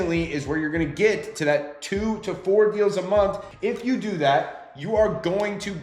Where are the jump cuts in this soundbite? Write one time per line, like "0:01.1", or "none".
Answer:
0:03.5